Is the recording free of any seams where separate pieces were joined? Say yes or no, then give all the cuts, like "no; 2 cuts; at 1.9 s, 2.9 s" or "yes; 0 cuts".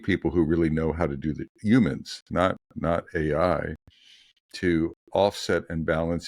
yes; 0 cuts